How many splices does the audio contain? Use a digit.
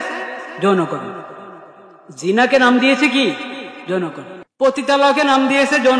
1